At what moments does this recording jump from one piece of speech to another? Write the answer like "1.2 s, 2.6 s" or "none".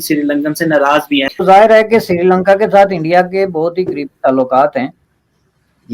1.3 s